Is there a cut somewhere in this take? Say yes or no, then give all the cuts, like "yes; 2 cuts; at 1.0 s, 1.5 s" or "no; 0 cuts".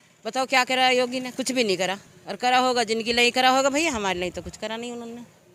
no; 0 cuts